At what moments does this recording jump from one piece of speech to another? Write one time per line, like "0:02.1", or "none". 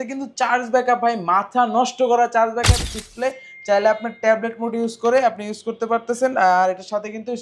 0:02.8